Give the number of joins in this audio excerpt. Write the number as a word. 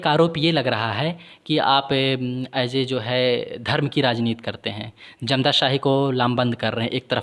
zero